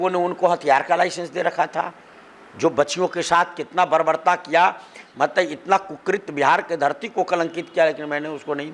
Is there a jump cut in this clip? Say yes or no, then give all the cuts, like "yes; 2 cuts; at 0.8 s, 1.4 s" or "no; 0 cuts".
no; 0 cuts